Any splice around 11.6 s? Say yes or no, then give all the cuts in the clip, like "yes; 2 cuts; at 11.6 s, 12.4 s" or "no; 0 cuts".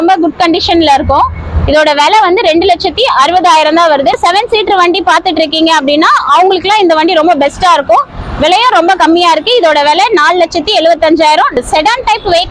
yes; 2 cuts; at 4.1 s, 11.6 s